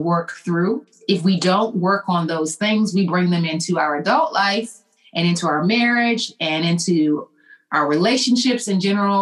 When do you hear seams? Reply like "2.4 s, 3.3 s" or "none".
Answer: 0.9 s